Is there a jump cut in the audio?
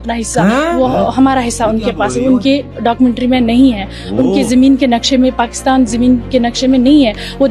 no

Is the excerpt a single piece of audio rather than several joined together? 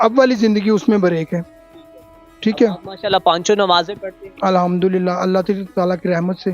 yes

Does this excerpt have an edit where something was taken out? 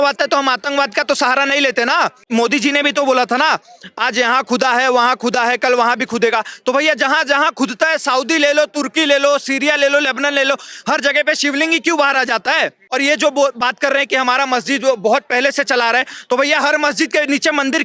yes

